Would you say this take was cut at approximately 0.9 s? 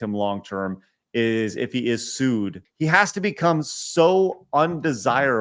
no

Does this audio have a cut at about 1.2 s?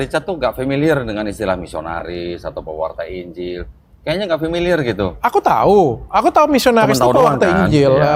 no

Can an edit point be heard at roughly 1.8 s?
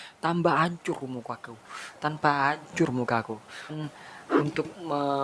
no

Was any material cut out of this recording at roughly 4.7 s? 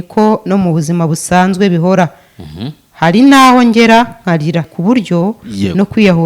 yes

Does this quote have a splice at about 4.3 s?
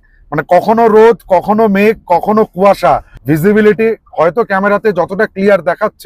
no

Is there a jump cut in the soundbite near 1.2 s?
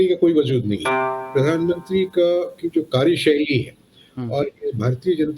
yes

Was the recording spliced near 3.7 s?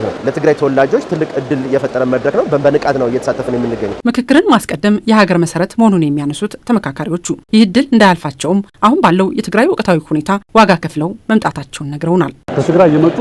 no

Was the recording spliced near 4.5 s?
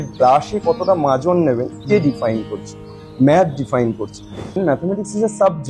yes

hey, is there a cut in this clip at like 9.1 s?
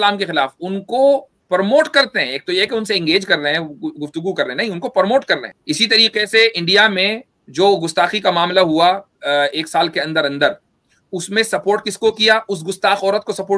no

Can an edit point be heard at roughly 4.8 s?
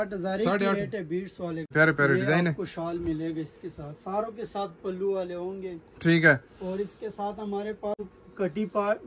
no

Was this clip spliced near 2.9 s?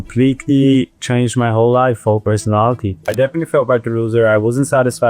yes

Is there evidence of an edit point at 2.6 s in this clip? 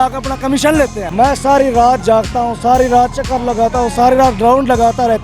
no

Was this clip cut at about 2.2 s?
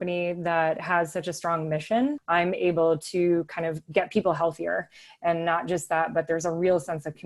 yes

